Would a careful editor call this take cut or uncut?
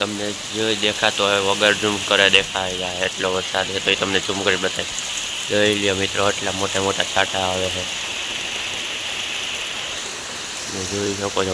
uncut